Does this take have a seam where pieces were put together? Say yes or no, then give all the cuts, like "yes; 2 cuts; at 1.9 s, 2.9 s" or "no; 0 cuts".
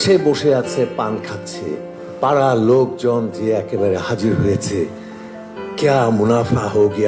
yes; 1 cut; at 1.9 s